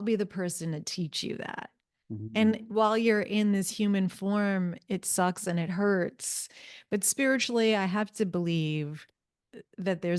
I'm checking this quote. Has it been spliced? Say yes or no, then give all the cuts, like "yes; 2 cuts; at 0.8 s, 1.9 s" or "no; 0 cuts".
no; 0 cuts